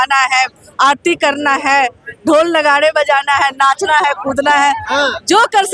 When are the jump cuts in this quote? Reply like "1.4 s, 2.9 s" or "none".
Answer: none

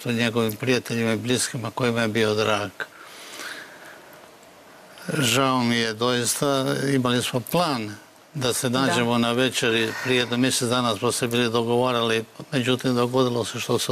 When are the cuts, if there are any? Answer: none

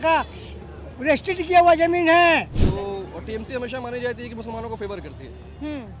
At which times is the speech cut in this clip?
2.6 s

